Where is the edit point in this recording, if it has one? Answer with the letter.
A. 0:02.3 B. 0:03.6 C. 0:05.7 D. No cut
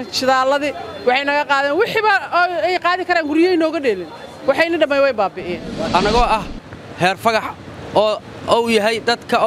C